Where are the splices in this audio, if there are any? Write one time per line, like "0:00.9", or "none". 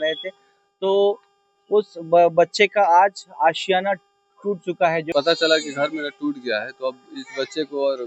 0:05.1